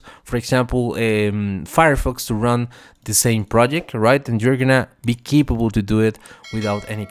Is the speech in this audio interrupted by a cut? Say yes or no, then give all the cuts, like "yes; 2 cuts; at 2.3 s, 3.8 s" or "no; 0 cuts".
no; 0 cuts